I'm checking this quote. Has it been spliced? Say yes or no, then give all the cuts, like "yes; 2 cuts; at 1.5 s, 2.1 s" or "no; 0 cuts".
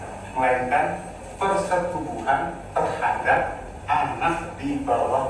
no; 0 cuts